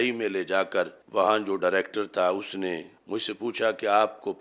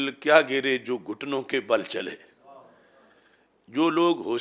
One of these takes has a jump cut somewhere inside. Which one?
first; 2 cuts; at 1.0 s, 2.9 s

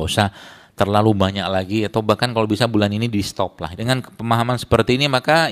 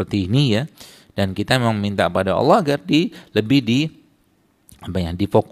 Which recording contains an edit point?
first; 1 cut; at 3.7 s

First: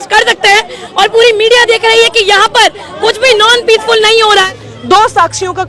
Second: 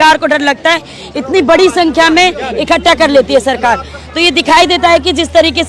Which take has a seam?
first; 1 cut; at 4.5 s

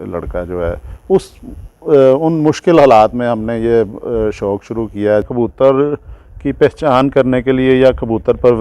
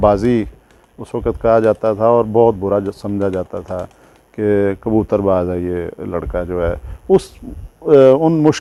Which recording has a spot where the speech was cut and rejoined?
first; 1 cut; at 5.3 s

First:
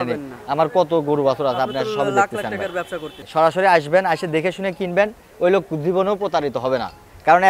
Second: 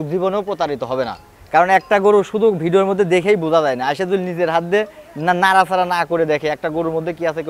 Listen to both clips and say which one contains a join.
first; 1 cut; at 3.2 s

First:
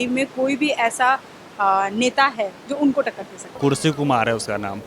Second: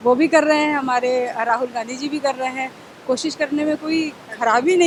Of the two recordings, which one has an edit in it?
first; 1 cut; at 3.6 s

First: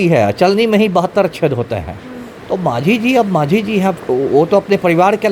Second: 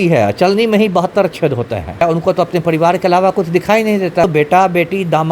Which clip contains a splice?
second; 2 cuts; at 2.0 s, 4.2 s

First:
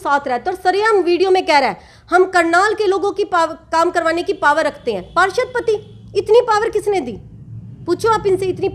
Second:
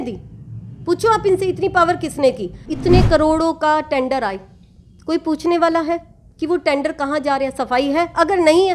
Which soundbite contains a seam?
second; 1 cut; at 2.7 s

